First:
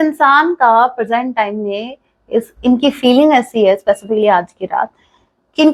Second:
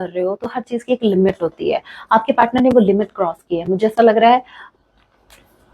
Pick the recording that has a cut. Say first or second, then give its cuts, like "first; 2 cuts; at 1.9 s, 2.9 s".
second; 1 cut; at 4.6 s